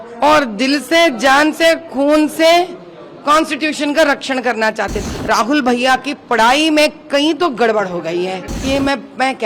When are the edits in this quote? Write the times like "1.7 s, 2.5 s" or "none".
5.0 s, 8.5 s